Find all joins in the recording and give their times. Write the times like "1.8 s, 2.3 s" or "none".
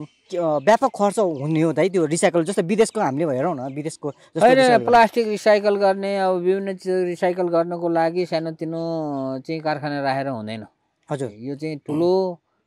none